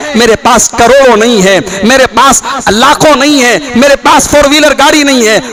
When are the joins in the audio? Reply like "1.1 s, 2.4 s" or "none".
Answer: none